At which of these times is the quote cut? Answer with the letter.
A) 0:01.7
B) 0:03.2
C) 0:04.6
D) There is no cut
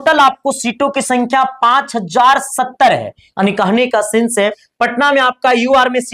C